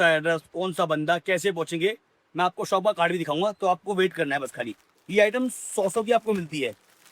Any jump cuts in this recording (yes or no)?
no